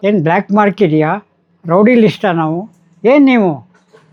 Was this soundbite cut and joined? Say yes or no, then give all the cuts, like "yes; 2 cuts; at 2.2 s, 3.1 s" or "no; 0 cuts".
no; 0 cuts